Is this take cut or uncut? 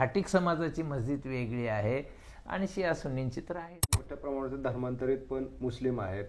cut